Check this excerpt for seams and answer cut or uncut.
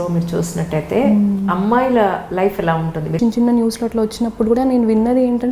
cut